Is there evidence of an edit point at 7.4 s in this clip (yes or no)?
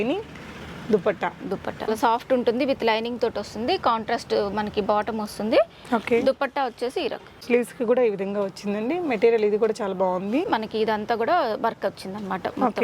yes